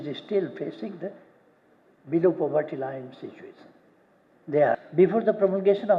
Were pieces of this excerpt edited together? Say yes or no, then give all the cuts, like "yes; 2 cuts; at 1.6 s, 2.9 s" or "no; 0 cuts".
yes; 1 cut; at 4.8 s